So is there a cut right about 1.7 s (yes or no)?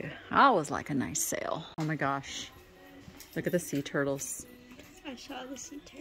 yes